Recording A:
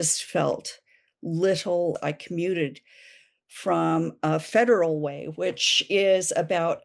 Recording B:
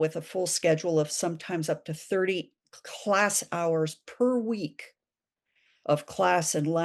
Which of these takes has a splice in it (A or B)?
A